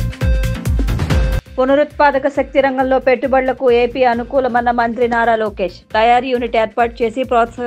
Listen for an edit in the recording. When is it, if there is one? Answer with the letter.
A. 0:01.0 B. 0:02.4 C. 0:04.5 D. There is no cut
A